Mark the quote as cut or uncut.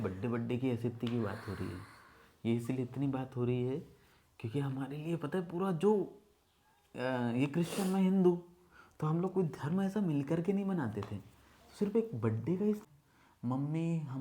cut